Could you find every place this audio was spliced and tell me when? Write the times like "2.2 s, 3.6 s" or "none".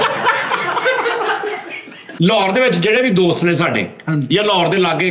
2.0 s